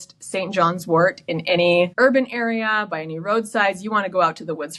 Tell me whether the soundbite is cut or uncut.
cut